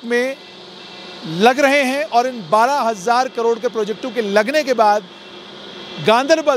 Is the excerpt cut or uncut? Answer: uncut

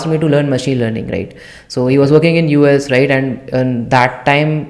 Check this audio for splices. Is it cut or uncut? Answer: uncut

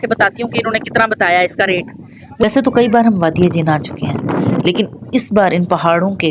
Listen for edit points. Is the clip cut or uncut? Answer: cut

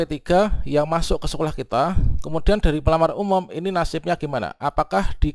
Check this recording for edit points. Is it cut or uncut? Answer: uncut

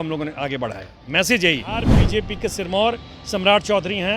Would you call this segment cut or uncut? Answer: cut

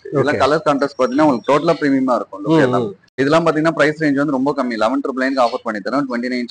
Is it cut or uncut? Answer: cut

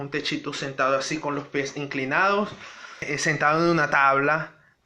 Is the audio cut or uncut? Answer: cut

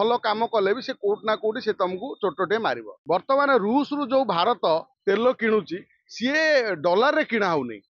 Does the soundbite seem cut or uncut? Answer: cut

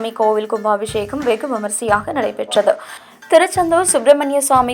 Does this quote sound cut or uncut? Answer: cut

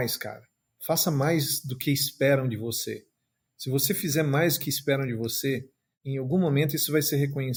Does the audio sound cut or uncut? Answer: uncut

